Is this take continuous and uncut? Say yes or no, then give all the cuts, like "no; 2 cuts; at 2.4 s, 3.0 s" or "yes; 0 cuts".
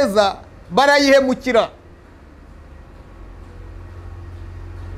yes; 0 cuts